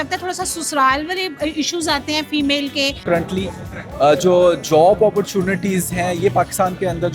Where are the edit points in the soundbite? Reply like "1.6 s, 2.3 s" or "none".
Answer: 3.0 s